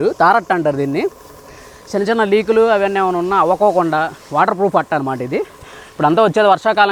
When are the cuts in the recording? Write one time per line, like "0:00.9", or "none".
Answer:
none